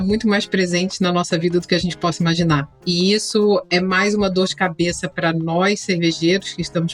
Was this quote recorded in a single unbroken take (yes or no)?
no